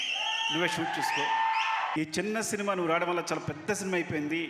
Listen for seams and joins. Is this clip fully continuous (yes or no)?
no